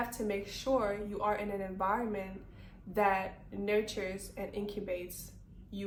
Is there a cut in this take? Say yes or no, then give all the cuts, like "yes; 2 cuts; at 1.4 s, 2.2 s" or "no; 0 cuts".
no; 0 cuts